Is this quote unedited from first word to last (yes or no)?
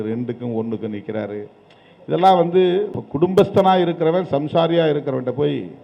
no